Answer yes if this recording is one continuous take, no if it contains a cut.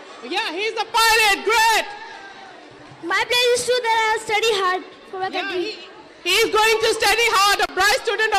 yes